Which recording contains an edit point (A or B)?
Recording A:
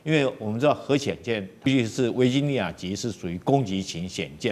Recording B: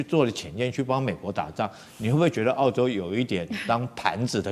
A